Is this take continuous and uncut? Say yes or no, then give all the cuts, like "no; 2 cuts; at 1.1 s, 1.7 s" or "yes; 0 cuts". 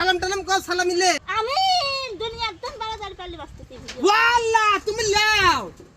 no; 1 cut; at 1.2 s